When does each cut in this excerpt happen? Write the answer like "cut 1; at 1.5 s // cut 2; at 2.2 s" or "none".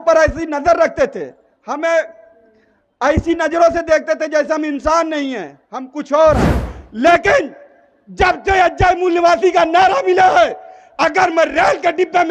cut 1; at 6.6 s